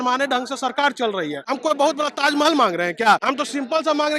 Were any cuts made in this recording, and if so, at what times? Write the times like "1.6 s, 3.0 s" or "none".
1.5 s, 3.2 s